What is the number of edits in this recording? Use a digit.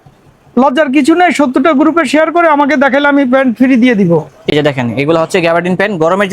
1